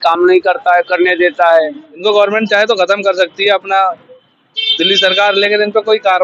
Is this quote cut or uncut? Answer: cut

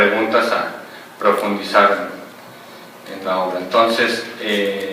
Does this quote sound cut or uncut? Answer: cut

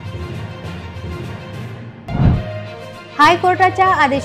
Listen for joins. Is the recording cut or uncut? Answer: cut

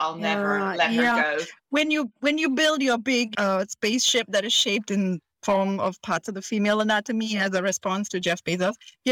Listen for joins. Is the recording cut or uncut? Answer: cut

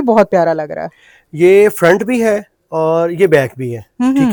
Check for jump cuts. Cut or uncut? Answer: uncut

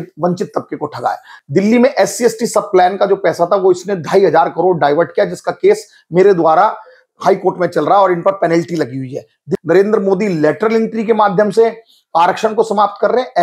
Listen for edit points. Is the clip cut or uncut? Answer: cut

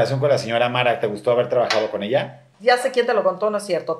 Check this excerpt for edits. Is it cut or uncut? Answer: cut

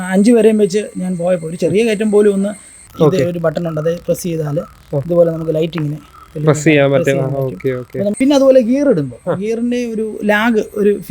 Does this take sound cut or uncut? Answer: cut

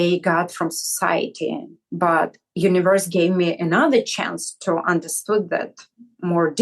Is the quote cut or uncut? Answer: cut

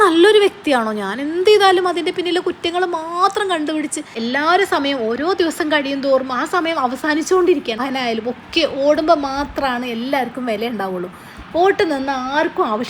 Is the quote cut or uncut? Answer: cut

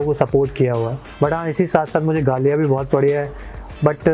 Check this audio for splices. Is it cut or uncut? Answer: cut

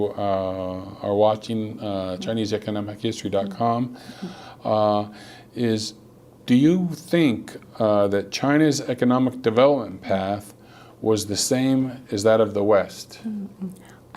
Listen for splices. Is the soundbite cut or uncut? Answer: uncut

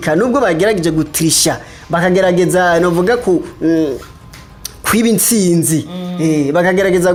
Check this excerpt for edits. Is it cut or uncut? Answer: uncut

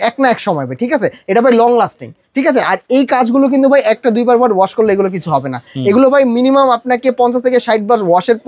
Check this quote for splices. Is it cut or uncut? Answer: uncut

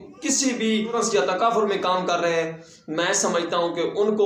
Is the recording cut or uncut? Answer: cut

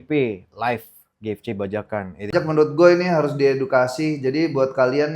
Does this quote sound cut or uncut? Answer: cut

